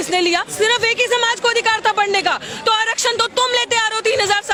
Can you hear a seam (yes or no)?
no